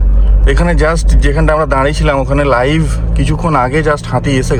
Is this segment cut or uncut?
uncut